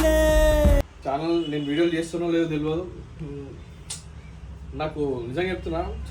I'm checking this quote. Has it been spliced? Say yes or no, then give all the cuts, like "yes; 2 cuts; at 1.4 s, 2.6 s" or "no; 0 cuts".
yes; 1 cut; at 1.0 s